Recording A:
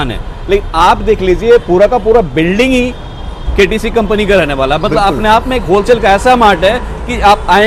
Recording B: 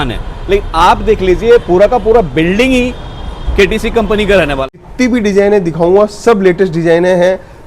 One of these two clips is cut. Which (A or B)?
B